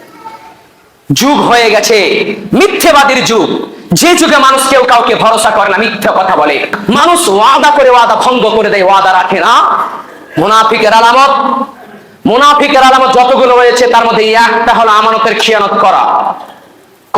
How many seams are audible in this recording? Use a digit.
1